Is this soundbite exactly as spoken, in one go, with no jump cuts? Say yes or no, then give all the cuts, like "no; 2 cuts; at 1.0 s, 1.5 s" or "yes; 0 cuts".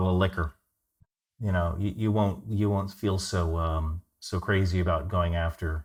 yes; 0 cuts